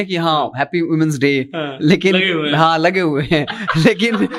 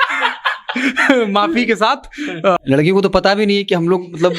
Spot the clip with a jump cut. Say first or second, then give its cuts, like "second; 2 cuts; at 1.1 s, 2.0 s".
second; 1 cut; at 2.6 s